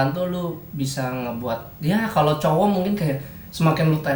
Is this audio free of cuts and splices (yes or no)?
yes